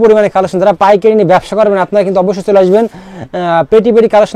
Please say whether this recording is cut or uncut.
uncut